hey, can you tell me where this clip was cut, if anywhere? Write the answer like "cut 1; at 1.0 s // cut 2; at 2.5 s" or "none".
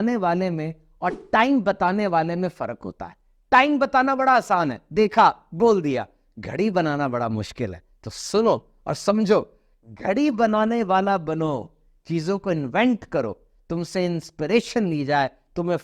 none